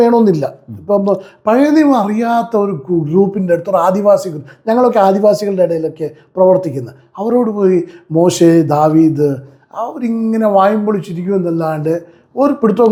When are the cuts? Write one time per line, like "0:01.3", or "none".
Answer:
none